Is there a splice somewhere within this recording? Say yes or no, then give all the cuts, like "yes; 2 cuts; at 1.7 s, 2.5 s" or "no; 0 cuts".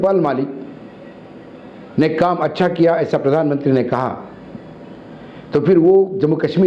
no; 0 cuts